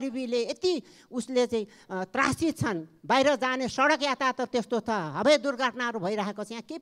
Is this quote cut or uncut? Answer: uncut